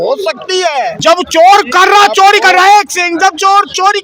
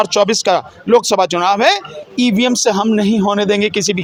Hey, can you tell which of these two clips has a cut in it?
first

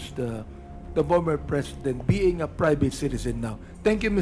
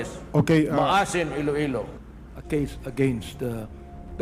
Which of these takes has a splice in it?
second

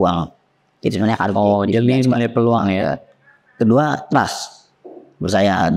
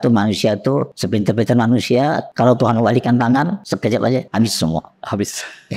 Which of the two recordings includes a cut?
second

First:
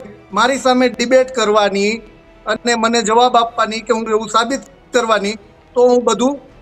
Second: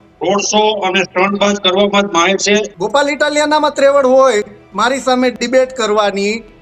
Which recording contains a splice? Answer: second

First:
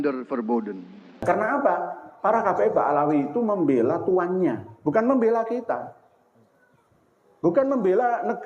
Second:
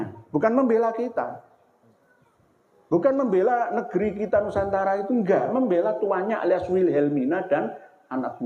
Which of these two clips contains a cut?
first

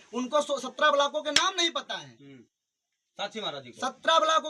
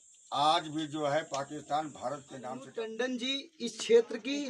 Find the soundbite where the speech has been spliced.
second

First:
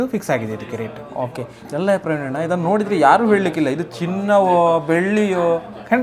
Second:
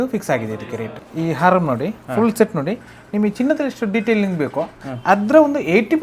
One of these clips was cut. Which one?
second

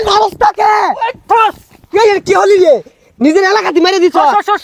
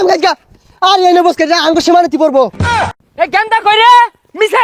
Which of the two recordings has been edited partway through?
second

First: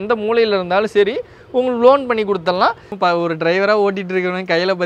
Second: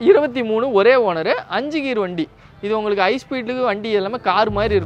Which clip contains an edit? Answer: first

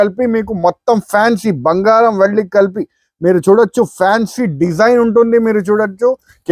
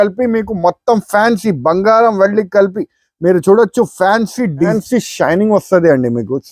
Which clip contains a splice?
second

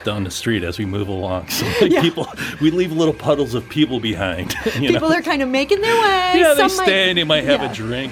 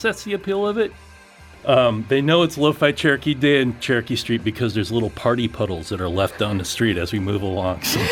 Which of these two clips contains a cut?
second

